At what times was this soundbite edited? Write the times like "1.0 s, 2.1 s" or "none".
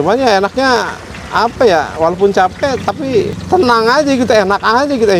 3.4 s

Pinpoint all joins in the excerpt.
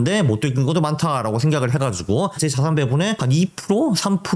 2.4 s, 3.2 s

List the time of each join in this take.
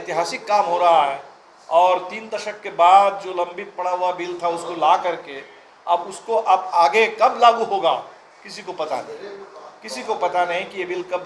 none

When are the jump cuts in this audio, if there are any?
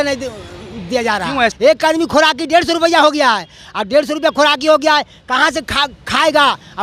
1.5 s

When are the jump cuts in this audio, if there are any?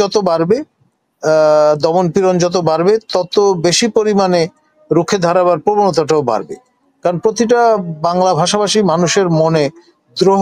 none

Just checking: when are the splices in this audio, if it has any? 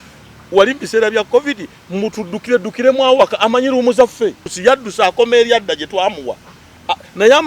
4.5 s

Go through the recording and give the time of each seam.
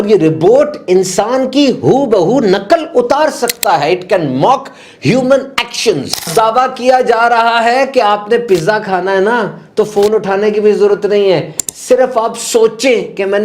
6.3 s

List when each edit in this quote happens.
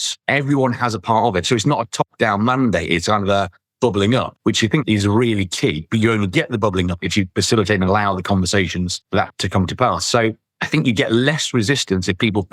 4.8 s, 7.1 s

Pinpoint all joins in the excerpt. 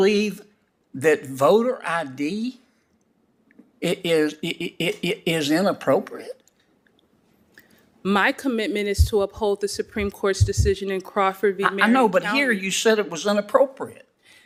none

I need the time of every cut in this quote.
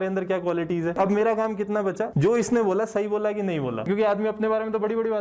1.0 s, 2.1 s, 3.9 s

